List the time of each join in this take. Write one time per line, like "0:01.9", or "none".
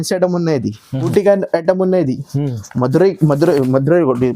0:01.1